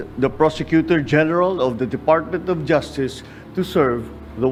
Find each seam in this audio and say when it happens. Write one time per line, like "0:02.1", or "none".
none